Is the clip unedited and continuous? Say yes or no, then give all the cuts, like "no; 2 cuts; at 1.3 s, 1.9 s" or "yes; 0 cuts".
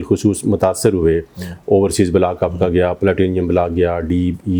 yes; 0 cuts